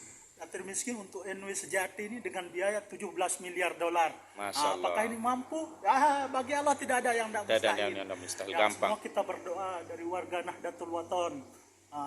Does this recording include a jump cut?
no; 0 cuts

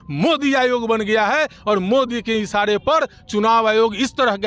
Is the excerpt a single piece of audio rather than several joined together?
yes; 0 cuts

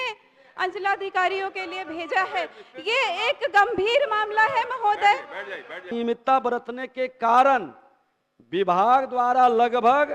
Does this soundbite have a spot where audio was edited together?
yes; 1 cut; at 5.9 s

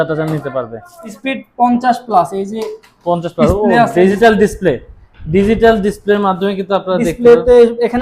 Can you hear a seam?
yes; 1 cut; at 1.2 s

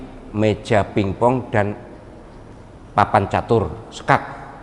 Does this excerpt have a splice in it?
no; 0 cuts

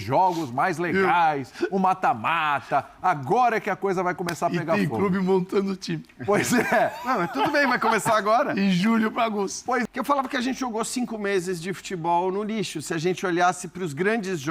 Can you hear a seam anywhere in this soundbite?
yes; 1 cut; at 9.8 s

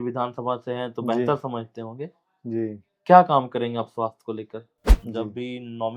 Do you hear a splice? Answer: yes; 1 cut; at 5.0 s

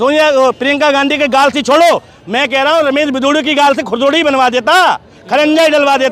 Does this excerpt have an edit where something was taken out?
no; 0 cuts

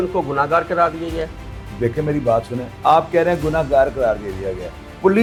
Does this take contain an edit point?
no; 0 cuts

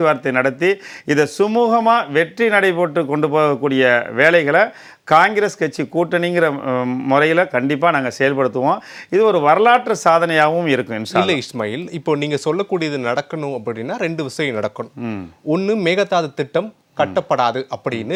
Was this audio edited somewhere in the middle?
no; 0 cuts

